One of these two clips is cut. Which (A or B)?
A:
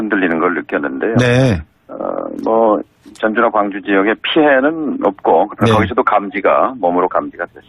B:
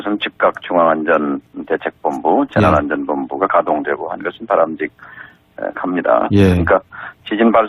A